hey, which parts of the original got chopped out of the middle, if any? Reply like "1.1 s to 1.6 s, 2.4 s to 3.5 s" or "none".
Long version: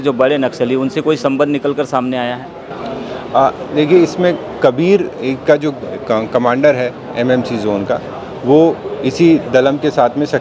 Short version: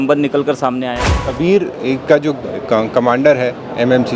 2.7 s to 4.7 s